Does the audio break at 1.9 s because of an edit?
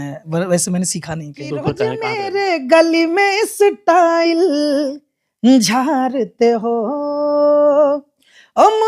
yes; 1 cut; at 1.9 s

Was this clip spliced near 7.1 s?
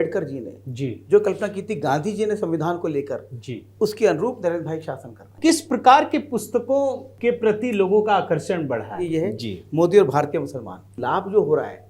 yes; 4 cuts; at 5.3 s, 7.1 s, 9.0 s, 10.9 s

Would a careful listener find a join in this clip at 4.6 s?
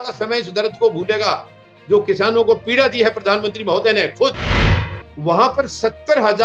yes; 1 cut; at 4.6 s

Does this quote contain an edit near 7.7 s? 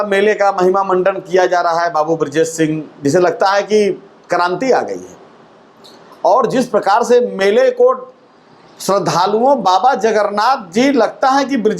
no; 0 cuts

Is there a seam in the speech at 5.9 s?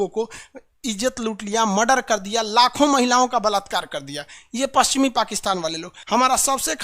yes; 1 cut; at 5.9 s

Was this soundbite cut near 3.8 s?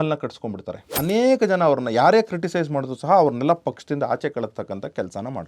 no; 1 cut; at 1.0 s

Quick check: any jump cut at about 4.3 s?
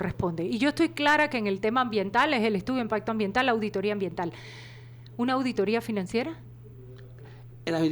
no; 0 cuts

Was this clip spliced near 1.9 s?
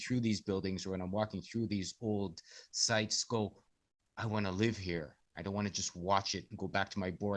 no; 0 cuts

